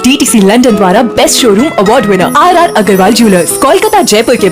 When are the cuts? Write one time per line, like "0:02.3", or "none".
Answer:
none

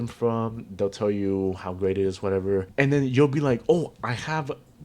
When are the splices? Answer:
0:02.7

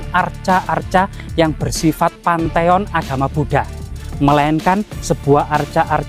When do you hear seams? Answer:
none

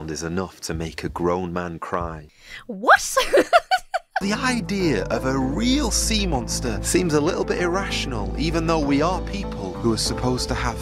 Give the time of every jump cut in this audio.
0:02.2
0:04.2

